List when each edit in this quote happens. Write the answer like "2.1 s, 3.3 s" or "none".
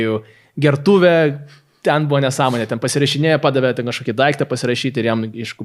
none